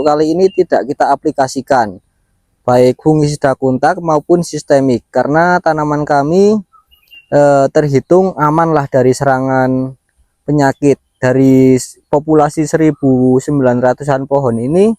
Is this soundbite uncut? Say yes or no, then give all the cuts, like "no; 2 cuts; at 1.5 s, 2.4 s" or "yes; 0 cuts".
yes; 0 cuts